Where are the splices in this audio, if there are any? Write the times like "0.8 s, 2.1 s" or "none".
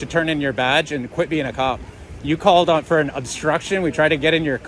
none